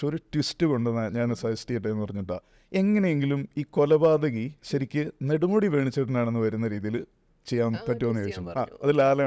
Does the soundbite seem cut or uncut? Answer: uncut